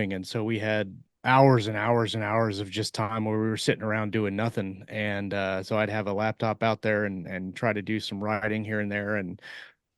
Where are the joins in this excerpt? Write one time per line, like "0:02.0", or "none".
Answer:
0:01.0